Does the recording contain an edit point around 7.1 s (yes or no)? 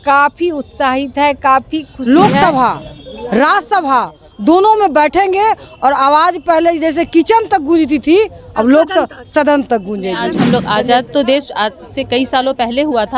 no